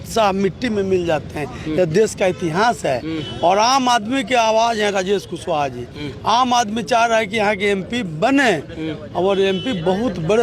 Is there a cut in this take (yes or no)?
no